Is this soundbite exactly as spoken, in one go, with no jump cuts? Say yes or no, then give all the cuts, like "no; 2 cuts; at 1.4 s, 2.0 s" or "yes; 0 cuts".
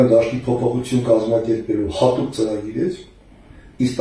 yes; 0 cuts